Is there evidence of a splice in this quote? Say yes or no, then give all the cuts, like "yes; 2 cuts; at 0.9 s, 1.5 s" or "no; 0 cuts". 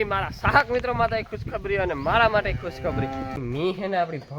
yes; 1 cut; at 3.4 s